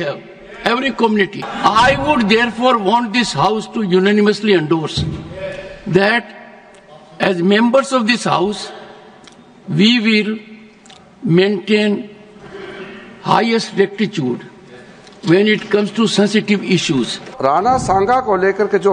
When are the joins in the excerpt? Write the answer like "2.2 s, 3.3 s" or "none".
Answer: 1.4 s, 17.2 s